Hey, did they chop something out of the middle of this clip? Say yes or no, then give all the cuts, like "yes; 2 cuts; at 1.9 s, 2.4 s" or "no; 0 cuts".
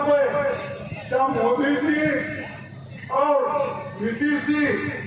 no; 0 cuts